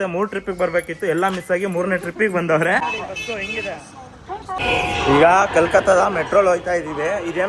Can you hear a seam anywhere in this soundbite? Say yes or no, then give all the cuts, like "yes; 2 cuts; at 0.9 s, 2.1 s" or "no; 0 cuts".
yes; 1 cut; at 2.8 s